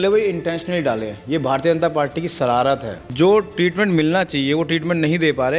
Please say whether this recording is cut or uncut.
cut